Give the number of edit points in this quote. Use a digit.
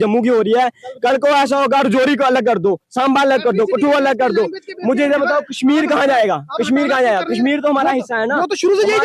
0